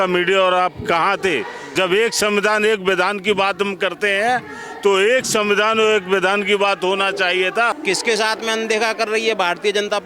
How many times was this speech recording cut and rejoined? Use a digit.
2